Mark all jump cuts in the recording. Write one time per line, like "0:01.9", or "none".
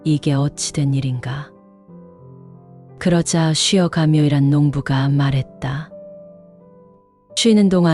0:01.5
0:02.9